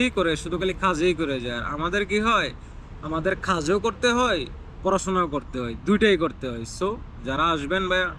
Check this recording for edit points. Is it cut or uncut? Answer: uncut